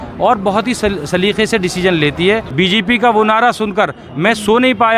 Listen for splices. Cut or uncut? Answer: cut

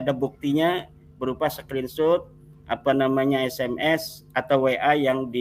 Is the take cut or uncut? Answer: uncut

